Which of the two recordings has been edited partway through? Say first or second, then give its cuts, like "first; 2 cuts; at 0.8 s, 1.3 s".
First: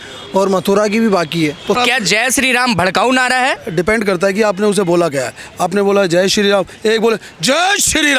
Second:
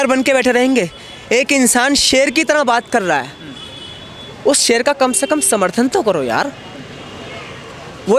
first; 2 cuts; at 1.8 s, 3.6 s